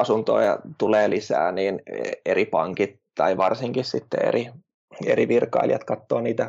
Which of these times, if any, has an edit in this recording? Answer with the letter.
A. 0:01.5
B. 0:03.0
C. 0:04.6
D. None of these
D